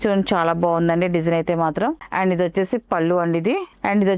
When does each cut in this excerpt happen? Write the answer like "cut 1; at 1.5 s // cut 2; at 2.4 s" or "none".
none